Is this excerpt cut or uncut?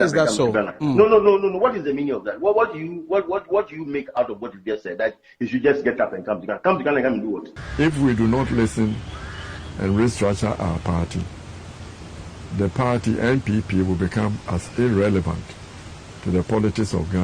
cut